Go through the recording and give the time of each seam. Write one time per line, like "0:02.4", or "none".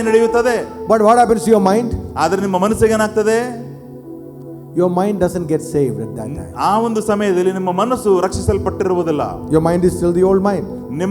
none